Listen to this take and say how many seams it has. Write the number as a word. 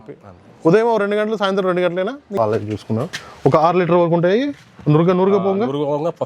one